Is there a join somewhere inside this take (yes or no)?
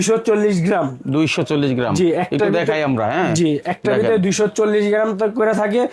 no